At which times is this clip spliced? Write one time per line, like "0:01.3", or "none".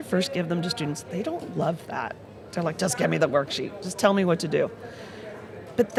none